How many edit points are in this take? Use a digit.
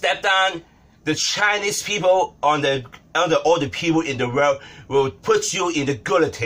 0